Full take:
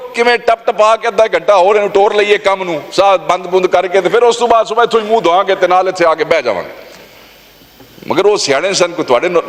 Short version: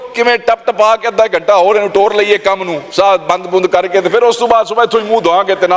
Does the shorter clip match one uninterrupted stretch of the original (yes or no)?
yes